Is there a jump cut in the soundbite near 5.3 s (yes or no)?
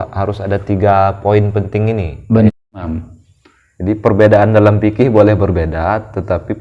no